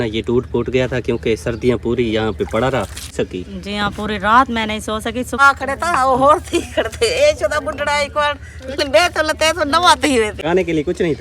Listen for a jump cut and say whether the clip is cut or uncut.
cut